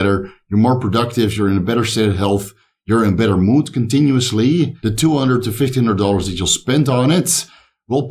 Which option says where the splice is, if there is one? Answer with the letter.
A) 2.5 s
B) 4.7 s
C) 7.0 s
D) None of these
B